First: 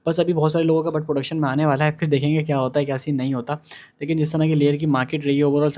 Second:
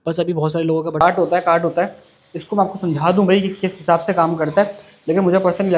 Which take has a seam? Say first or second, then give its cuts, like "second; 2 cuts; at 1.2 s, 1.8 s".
second; 1 cut; at 1.0 s